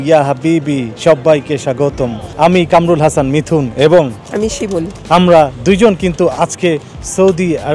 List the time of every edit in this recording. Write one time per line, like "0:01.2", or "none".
0:02.2
0:04.9